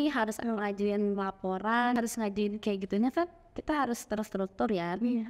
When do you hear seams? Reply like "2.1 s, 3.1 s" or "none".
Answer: 2.0 s